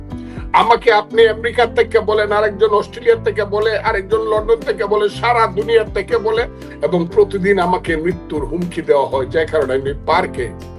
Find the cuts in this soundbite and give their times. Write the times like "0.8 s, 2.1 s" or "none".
6.6 s